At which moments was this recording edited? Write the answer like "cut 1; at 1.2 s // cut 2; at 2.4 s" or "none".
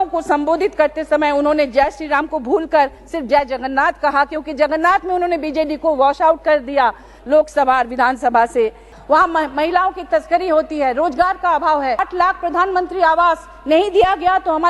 cut 1; at 8.9 s // cut 2; at 12.0 s